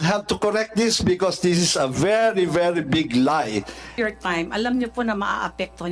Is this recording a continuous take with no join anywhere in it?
no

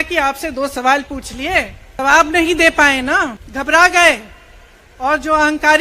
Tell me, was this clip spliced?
yes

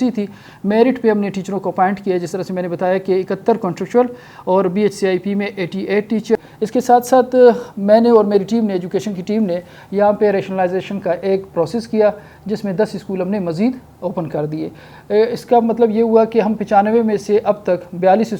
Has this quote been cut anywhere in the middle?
yes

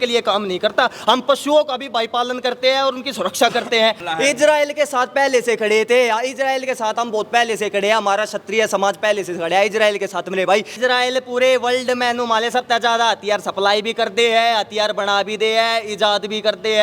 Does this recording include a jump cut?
yes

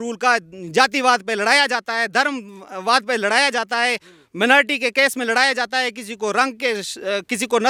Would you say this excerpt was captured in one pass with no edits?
yes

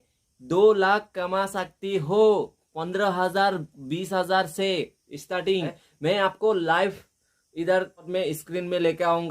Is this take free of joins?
no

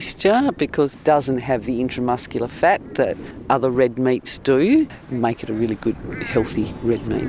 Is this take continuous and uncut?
no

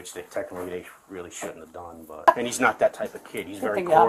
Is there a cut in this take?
yes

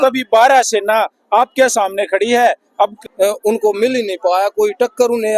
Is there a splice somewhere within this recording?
yes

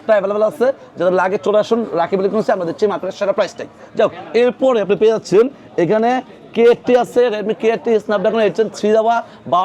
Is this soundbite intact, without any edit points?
yes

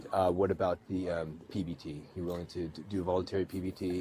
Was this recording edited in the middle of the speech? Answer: no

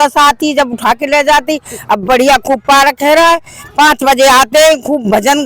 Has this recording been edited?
no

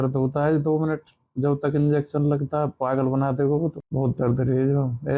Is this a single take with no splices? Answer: no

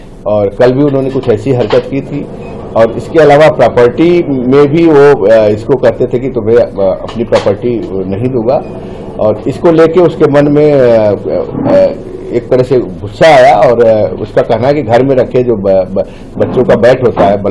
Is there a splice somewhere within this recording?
no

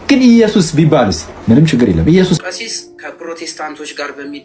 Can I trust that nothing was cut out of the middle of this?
no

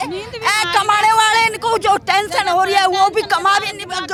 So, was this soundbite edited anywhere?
no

